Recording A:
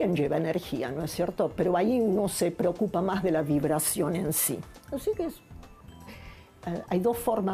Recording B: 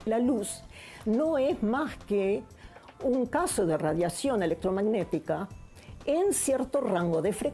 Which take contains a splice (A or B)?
A